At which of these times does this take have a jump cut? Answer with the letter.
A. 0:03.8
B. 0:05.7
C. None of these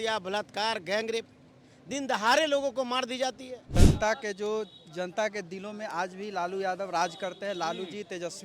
A